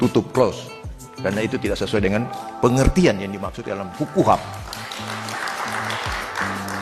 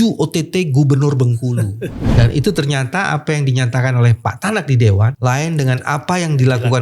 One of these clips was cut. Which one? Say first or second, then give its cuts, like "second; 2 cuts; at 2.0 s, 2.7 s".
second; 2 cuts; at 2.1 s, 5.1 s